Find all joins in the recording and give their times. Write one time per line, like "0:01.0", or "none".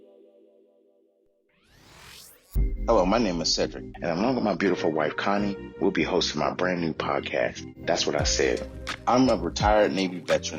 0:01.5